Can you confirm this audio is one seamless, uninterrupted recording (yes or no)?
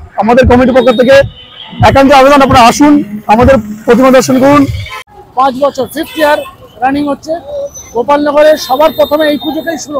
no